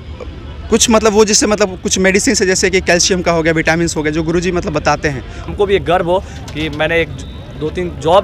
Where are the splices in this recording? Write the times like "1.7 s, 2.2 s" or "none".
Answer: 5.5 s